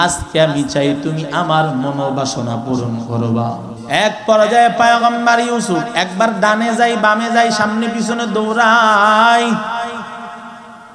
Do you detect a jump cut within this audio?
yes; 1 cut; at 3.7 s

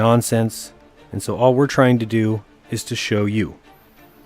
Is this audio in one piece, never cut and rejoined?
no; 1 cut; at 1.4 s

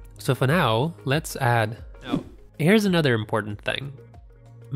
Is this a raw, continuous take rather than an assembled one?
no; 1 cut; at 2.4 s

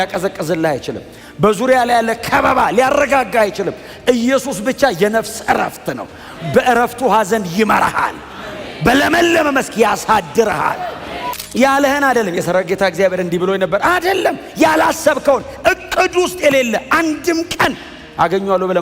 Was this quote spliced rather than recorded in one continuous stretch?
yes; 1 cut; at 11.4 s

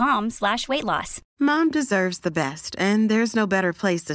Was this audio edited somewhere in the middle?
yes; 1 cut; at 1.2 s

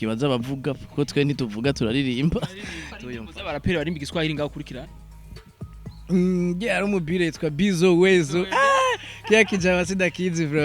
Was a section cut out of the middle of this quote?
yes; 1 cut; at 2.8 s

